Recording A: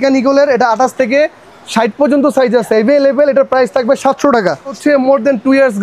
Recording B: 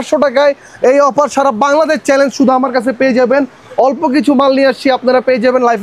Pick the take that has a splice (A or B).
A